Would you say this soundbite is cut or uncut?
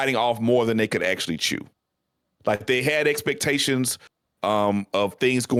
uncut